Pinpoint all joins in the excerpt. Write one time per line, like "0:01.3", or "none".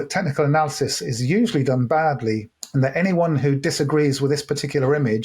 0:02.5